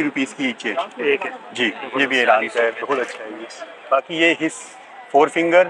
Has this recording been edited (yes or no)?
no